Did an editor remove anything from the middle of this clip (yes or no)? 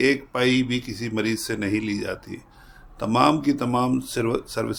no